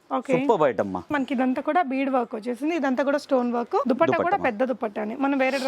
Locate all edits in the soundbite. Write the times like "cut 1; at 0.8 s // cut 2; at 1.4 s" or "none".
cut 1; at 1.1 s // cut 2; at 3.8 s